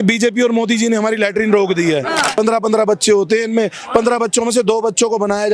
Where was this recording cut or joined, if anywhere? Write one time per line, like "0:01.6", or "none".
0:02.4